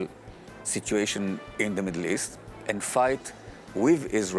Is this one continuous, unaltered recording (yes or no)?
no